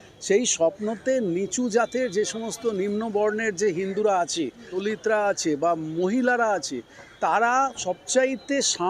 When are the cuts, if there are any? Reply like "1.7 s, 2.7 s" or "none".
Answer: 4.8 s